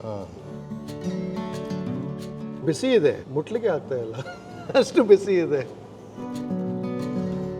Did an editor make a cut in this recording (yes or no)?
yes